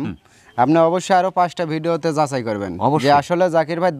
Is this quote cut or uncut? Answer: uncut